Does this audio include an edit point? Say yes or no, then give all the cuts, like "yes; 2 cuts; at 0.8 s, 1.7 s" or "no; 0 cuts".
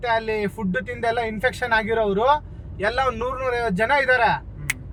no; 0 cuts